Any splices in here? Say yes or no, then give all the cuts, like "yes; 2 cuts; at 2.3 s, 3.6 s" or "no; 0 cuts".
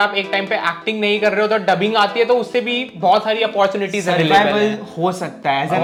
no; 0 cuts